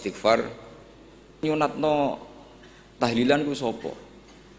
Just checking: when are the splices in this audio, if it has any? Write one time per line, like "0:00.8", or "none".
0:01.4